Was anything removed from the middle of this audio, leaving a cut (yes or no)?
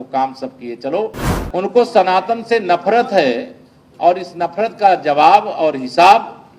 yes